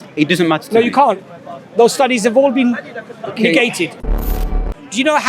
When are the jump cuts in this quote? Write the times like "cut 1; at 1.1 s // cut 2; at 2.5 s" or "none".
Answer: cut 1; at 4.4 s